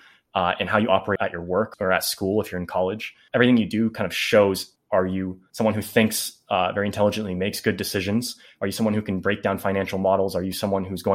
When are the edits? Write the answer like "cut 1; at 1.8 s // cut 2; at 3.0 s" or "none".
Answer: cut 1; at 1.5 s // cut 2; at 3.2 s // cut 3; at 5.1 s